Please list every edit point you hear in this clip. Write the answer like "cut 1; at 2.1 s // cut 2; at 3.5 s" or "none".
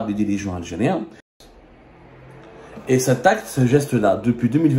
cut 1; at 1.3 s